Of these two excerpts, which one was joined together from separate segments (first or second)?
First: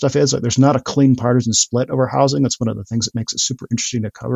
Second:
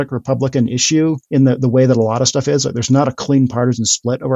second